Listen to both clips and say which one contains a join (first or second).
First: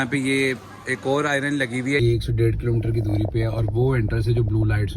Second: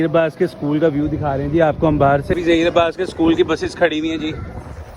first